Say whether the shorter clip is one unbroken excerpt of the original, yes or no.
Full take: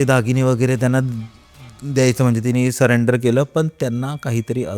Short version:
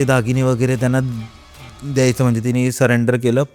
yes